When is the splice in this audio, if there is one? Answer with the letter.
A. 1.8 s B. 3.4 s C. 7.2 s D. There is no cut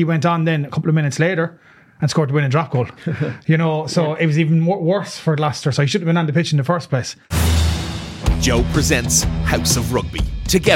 C